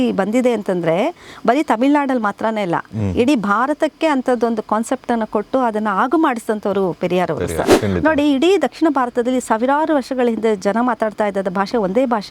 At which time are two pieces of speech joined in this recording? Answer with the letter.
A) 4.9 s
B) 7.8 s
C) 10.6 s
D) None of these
B